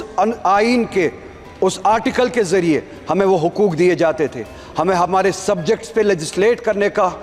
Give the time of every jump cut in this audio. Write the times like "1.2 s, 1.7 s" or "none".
none